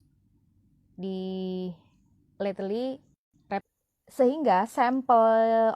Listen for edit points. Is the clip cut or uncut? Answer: cut